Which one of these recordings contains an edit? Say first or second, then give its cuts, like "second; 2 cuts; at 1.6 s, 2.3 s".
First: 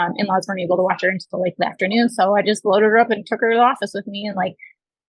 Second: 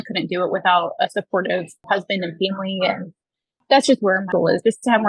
second; 3 cuts; at 1.8 s, 3.6 s, 4.3 s